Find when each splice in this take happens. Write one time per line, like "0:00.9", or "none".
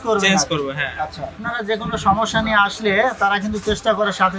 0:01.5

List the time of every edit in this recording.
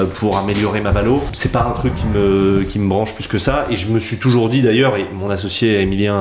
0:01.4

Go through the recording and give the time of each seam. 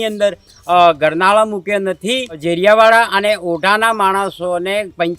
0:02.4

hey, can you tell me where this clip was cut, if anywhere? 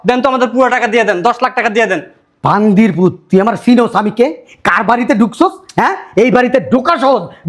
none

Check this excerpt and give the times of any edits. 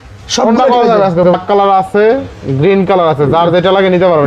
0:01.2

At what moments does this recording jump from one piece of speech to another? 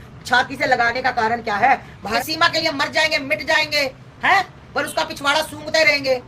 0:02.0

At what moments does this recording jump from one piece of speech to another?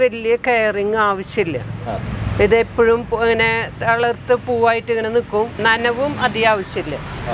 0:05.6

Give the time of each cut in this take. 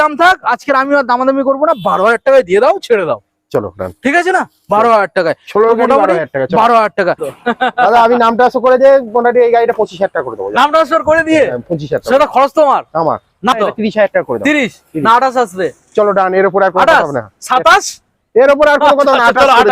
0:07.3
0:13.5

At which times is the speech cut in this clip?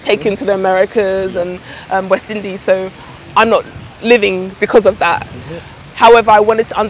none

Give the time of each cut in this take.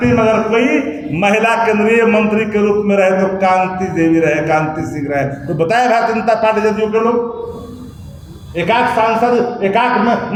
none

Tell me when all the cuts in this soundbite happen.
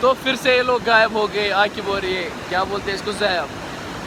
none

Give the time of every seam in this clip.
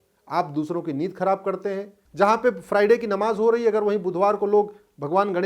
0:02.0

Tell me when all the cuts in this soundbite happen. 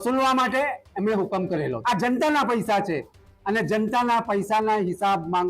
0:01.8

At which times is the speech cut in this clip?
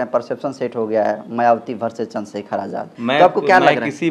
0:02.9

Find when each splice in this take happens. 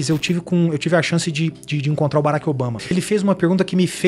0:02.9

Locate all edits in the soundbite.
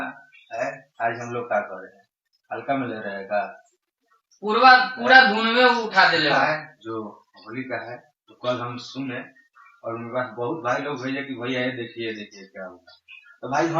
0:06.8

